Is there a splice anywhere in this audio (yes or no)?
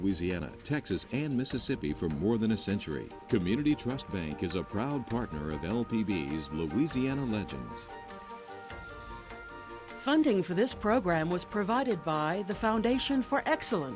yes